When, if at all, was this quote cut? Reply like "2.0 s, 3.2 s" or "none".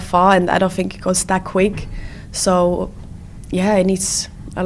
none